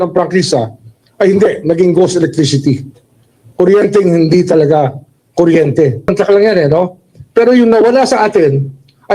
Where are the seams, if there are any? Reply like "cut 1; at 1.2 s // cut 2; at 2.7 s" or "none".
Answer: cut 1; at 6.1 s